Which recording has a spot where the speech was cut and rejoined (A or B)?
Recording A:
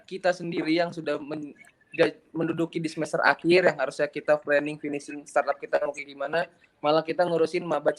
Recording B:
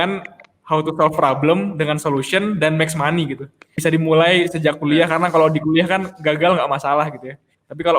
B